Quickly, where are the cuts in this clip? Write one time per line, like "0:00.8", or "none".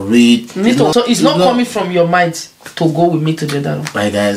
0:00.9